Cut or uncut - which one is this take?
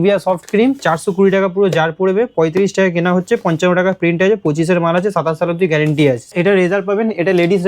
cut